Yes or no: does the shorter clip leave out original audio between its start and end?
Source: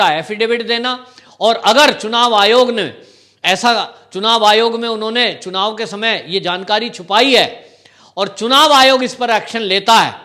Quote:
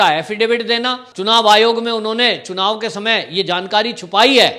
yes